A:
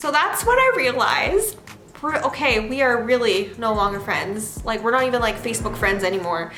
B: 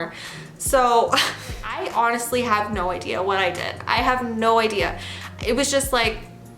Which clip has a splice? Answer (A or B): B